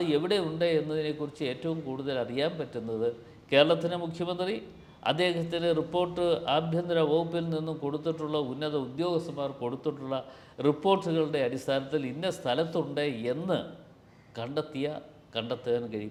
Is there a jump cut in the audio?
no; 0 cuts

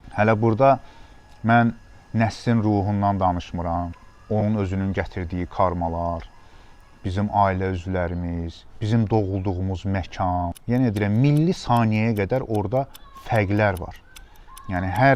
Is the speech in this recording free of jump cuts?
yes; 0 cuts

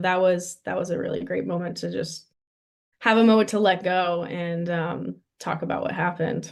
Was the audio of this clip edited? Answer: no; 0 cuts

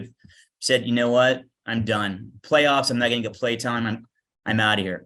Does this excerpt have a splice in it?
no; 0 cuts

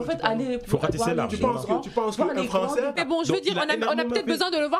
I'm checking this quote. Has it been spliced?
yes; 1 cut; at 2.9 s

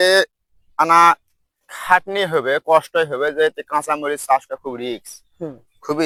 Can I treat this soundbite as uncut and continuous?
yes; 0 cuts

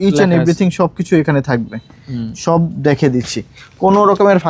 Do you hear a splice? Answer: no; 0 cuts

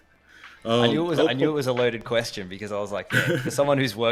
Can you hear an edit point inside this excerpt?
no; 0 cuts

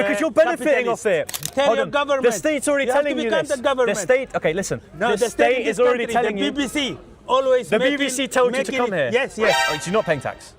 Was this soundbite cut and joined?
yes; 2 cuts; at 1.4 s, 9.6 s

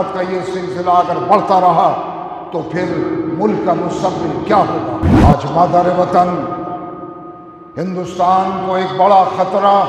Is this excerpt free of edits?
no; 1 cut; at 5.1 s

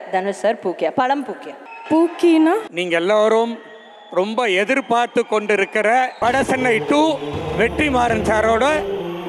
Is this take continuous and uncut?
no; 2 cuts; at 2.6 s, 6.1 s

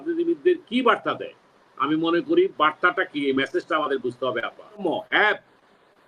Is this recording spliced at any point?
yes; 1 cut; at 4.8 s

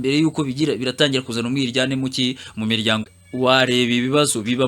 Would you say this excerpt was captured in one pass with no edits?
no; 1 cut; at 3.1 s

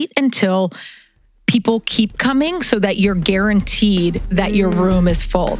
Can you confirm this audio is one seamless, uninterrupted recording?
yes; 0 cuts

